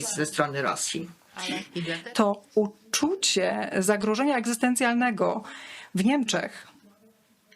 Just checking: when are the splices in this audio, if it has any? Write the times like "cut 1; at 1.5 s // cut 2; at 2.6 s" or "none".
cut 1; at 1.7 s